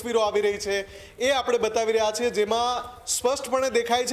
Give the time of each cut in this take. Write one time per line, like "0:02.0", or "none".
none